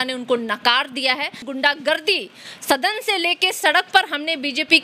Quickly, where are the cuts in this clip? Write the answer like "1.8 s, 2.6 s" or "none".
1.4 s